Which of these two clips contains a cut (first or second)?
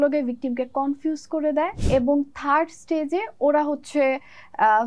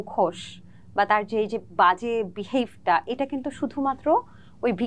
first